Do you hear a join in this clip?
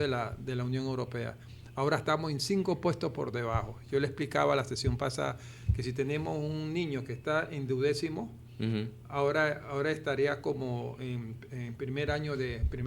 no; 0 cuts

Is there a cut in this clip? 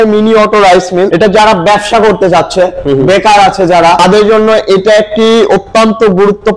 yes; 2 cuts; at 1.1 s, 4.0 s

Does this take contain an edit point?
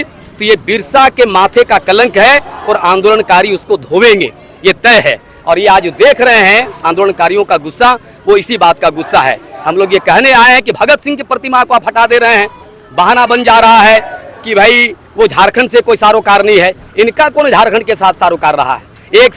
no; 0 cuts

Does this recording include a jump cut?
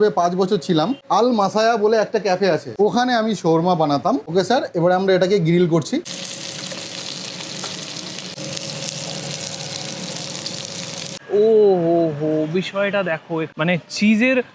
yes; 3 cuts; at 1.0 s, 6.1 s, 11.2 s

